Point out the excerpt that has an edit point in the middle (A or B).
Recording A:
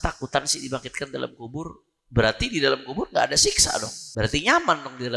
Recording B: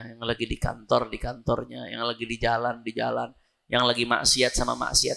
A